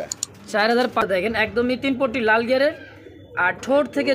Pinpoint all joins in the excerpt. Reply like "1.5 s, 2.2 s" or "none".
1.0 s